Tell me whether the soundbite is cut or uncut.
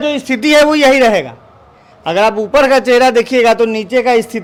uncut